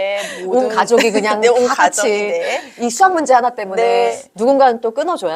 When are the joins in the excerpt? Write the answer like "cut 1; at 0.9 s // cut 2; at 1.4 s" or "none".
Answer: cut 1; at 4.1 s